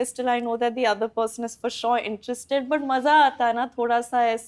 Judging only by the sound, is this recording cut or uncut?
uncut